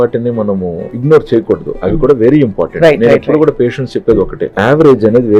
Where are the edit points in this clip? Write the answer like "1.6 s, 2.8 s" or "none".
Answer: 0.9 s, 4.4 s